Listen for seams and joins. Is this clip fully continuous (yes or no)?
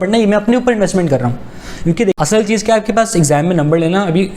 no